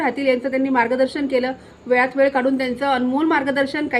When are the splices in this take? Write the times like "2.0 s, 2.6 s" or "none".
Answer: none

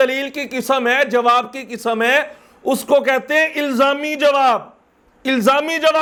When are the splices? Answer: none

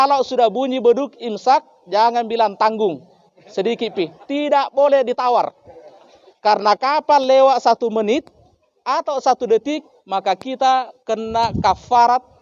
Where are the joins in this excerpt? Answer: none

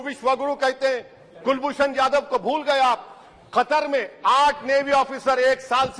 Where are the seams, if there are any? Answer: none

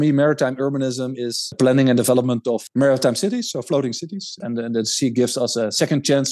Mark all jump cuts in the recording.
1.5 s, 2.6 s, 4.3 s

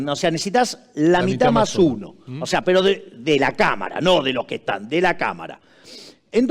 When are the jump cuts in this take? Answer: none

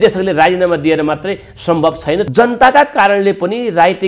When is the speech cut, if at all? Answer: 2.3 s

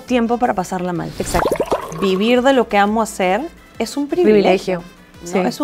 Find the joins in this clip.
1.7 s

